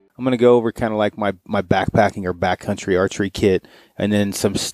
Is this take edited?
no; 0 cuts

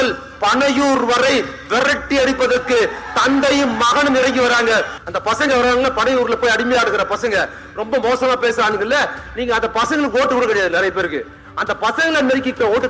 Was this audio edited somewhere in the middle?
yes; 1 cut; at 5.0 s

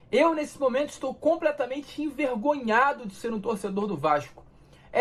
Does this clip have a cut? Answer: no; 0 cuts

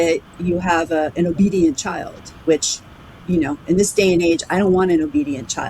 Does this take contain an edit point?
no; 0 cuts

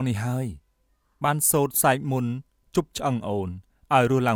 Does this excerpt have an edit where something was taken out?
no; 0 cuts

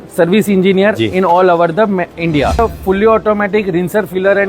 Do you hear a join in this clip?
yes; 1 cut; at 2.6 s

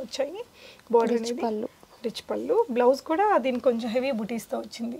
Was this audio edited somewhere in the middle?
no; 0 cuts

